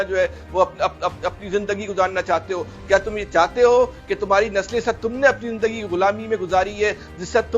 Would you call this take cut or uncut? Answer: uncut